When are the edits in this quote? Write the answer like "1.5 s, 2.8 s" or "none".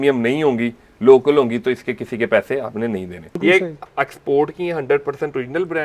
3.4 s